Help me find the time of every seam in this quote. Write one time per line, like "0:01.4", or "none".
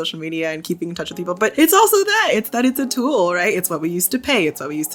0:01.5